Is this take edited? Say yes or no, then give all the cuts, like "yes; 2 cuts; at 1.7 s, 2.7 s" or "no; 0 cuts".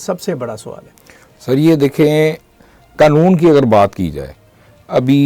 no; 0 cuts